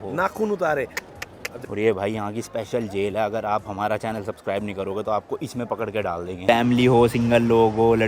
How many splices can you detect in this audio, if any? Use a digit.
2